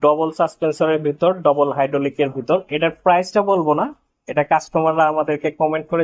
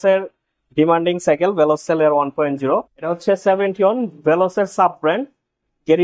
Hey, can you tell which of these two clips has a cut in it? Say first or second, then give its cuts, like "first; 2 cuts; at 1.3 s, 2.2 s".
second; 1 cut; at 3.1 s